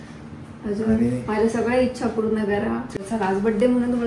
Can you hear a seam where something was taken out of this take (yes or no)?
yes